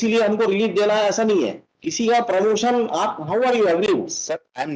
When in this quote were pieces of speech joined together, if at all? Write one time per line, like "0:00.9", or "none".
0:02.0